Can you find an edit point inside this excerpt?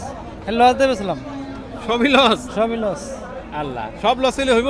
no; 0 cuts

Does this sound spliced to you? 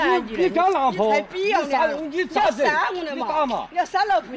no; 0 cuts

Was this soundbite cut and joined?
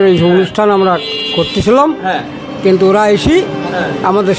no; 0 cuts

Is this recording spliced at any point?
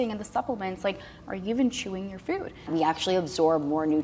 yes; 1 cut; at 2.7 s

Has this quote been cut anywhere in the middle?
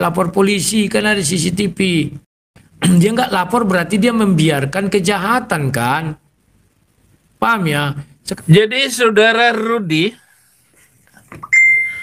yes; 1 cut; at 8.2 s

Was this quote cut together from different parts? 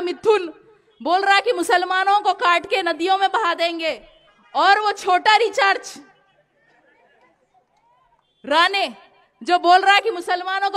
no; 0 cuts

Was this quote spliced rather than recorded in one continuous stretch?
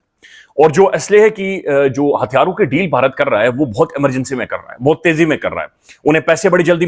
no; 0 cuts

